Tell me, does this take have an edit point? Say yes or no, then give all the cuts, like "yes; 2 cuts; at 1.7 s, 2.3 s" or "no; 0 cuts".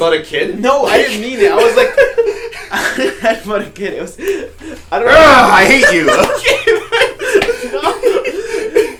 no; 0 cuts